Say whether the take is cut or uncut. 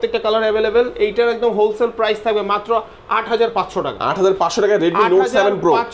uncut